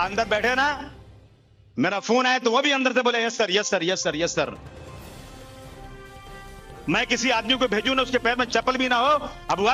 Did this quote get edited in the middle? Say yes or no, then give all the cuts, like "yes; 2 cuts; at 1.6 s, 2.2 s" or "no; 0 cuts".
no; 0 cuts